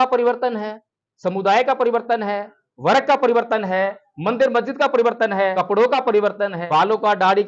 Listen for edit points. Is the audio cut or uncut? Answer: cut